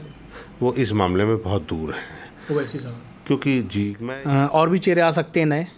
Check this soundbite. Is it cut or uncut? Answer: cut